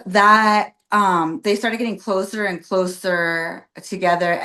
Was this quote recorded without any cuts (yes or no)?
yes